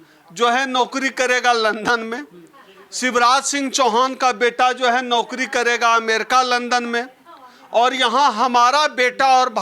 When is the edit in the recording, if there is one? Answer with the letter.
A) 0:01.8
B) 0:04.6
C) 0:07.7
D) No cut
D